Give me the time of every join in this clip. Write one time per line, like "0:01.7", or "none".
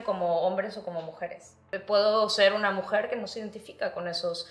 0:01.7

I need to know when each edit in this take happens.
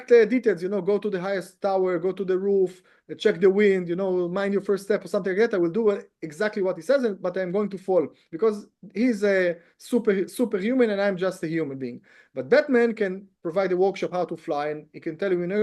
none

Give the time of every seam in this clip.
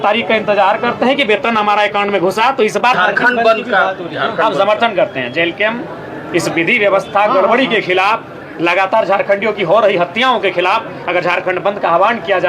0:02.9

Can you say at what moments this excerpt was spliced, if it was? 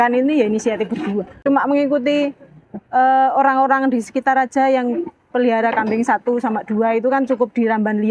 0:01.3

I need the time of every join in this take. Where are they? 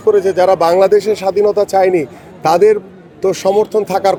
none

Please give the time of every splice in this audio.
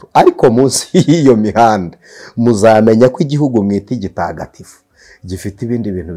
none

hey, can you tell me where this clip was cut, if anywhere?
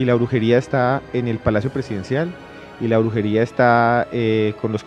none

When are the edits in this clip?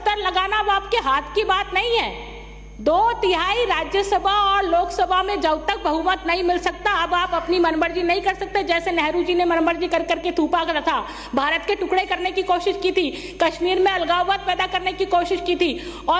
none

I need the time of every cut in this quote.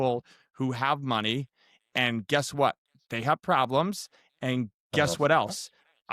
none

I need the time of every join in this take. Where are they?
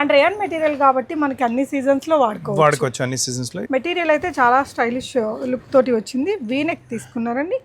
0:03.6

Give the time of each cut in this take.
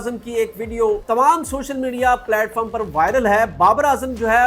0:01.0

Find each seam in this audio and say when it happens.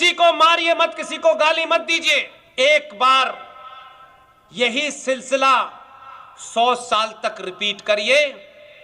0:02.4

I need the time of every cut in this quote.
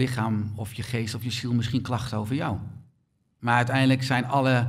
0:03.3

